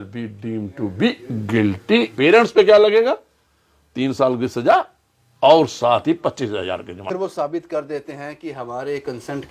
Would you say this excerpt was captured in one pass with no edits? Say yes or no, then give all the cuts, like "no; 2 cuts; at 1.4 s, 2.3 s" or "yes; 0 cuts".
no; 2 cuts; at 2.1 s, 7.1 s